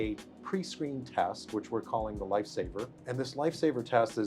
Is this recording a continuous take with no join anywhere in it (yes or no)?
no